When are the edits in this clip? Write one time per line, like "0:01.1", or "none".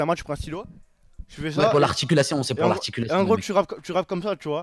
none